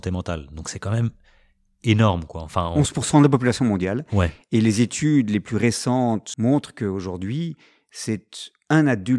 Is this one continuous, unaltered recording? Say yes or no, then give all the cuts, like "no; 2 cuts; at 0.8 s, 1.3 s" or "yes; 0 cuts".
no; 2 cuts; at 2.7 s, 6.3 s